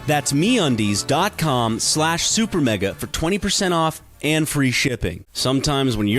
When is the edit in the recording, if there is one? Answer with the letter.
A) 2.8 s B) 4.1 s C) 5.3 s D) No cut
C